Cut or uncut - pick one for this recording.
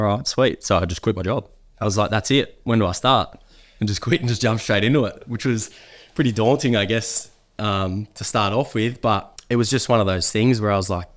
cut